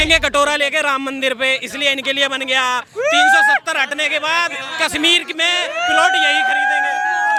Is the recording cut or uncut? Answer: uncut